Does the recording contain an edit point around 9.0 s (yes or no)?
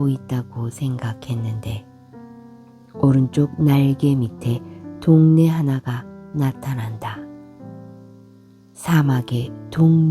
no